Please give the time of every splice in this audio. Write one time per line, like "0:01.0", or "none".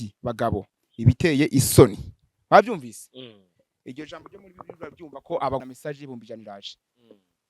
0:05.6